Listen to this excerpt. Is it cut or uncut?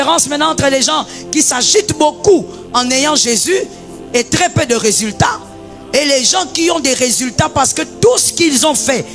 uncut